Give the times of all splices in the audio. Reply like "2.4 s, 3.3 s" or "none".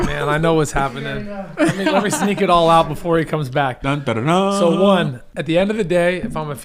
5.2 s